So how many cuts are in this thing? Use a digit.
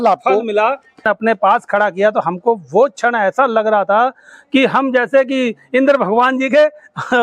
1